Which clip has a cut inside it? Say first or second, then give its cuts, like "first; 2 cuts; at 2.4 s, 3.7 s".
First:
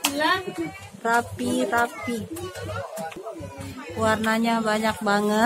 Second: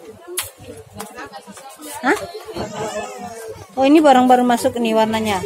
first; 1 cut; at 3.2 s